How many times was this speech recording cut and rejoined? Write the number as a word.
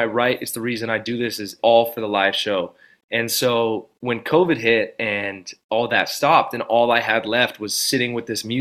one